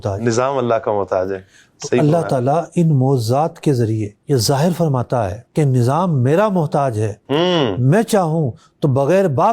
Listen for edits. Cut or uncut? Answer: uncut